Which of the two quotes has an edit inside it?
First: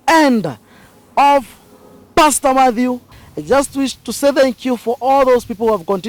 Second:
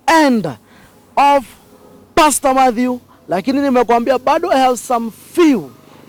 first; 1 cut; at 3.1 s

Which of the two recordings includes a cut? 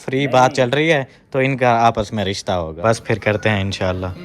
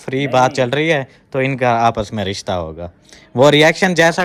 first; 1 cut; at 2.7 s

